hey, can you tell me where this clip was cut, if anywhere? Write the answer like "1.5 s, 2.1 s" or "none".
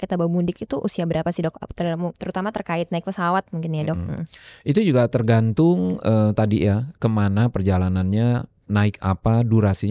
none